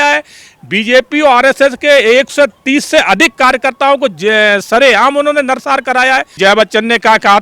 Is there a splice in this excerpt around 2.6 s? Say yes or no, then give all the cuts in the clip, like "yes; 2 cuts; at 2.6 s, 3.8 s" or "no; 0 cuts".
no; 1 cut; at 6.4 s